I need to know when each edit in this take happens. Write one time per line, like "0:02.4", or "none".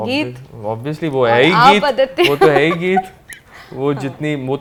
none